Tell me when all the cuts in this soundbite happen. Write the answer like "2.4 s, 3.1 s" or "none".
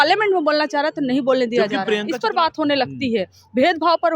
2.1 s